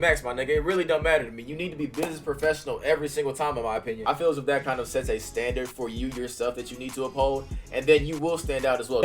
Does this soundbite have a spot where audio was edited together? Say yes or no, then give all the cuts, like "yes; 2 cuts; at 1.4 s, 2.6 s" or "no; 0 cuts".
no; 0 cuts